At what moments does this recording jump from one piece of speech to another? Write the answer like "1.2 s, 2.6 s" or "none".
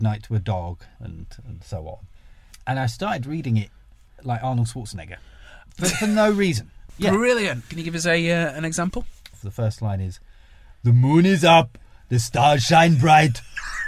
0.9 s, 5.6 s, 6.9 s, 9.4 s